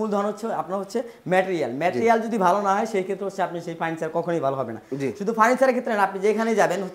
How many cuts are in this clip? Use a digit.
0